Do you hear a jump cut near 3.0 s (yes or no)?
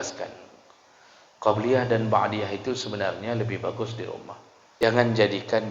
no